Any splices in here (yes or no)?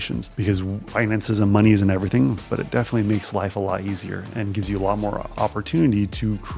no